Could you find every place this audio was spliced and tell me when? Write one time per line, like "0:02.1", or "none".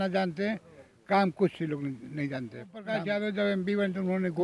0:02.9